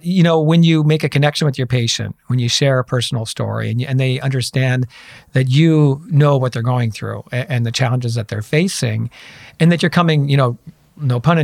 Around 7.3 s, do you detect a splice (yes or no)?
no